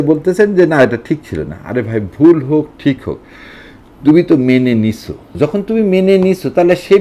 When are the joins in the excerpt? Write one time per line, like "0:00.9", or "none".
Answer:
0:05.4